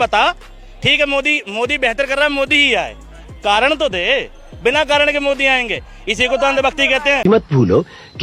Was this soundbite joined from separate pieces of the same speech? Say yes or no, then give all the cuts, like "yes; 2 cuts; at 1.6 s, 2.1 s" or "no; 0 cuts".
no; 0 cuts